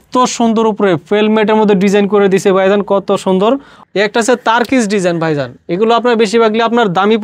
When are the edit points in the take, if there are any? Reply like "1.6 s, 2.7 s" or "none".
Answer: 3.7 s